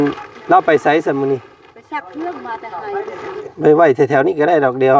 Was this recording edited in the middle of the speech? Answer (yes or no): yes